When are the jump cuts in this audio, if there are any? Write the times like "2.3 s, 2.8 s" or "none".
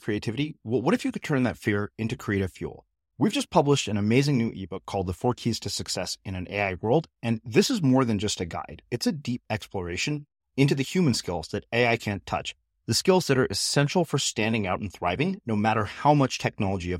none